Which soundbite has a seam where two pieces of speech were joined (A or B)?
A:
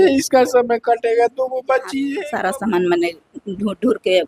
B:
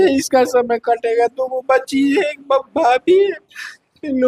A